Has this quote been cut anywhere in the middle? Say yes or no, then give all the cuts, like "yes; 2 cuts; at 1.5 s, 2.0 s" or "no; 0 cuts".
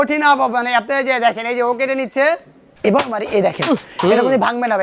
yes; 1 cut; at 2.7 s